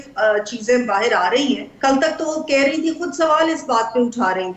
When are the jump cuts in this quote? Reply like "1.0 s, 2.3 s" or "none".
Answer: 1.7 s